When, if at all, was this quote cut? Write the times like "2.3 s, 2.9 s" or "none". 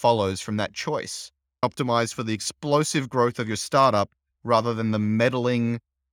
1.6 s